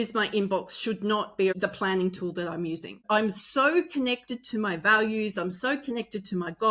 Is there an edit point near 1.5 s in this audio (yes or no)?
yes